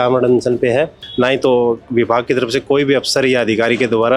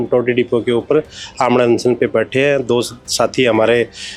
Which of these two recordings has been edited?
first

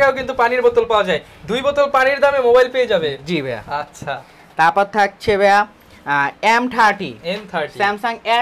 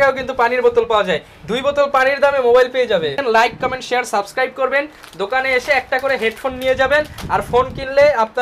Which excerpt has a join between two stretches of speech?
second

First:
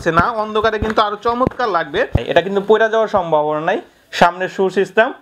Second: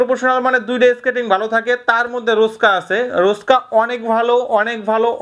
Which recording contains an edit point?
first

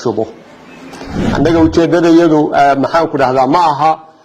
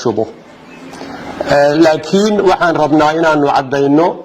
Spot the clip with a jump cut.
first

